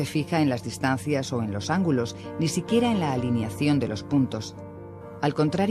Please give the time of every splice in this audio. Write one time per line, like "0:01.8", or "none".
0:02.6